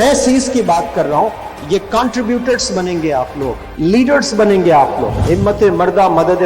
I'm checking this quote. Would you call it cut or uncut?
cut